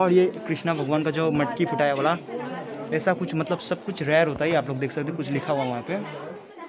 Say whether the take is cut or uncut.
uncut